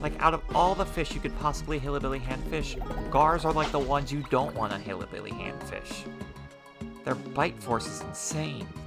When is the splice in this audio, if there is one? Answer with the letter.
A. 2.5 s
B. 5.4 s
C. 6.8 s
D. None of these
D